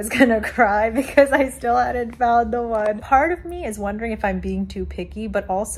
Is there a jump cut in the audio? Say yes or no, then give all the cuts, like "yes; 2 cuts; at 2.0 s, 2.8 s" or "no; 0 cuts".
no; 0 cuts